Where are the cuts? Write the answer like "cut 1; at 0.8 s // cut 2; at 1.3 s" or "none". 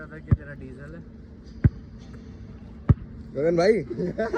none

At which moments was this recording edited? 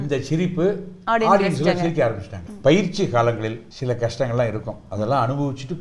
cut 1; at 2.4 s // cut 2; at 3.7 s

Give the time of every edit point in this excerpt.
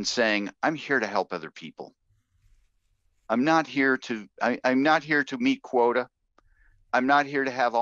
none

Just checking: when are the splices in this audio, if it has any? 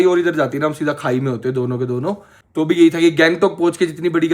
cut 1; at 2.3 s

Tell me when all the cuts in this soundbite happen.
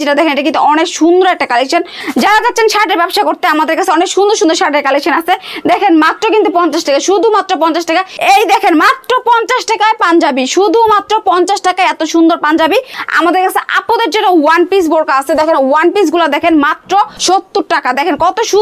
cut 1; at 2.0 s // cut 2; at 8.1 s // cut 3; at 13.0 s // cut 4; at 17.2 s

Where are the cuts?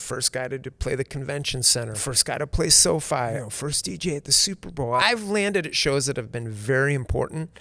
cut 1; at 2.0 s // cut 2; at 3.4 s // cut 3; at 5.0 s

